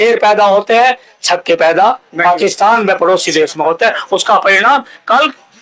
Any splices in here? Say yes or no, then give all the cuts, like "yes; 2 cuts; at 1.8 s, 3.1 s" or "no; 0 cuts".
no; 0 cuts